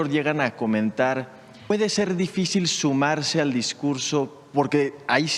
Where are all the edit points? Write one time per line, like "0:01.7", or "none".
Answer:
0:01.7
0:04.4